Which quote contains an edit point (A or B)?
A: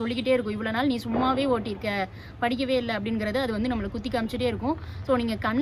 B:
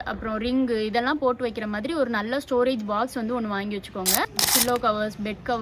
B